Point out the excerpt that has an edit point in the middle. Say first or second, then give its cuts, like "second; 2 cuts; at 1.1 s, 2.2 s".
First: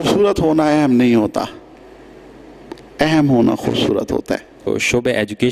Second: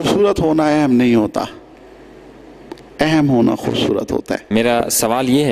first; 1 cut; at 4.5 s